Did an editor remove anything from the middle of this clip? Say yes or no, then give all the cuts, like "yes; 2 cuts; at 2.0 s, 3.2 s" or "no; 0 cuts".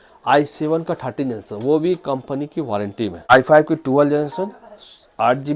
yes; 1 cut; at 3.3 s